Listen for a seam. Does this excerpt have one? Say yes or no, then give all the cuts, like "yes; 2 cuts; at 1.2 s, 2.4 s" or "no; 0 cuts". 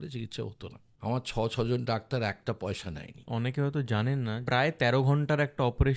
yes; 3 cuts; at 0.9 s, 3.3 s, 4.4 s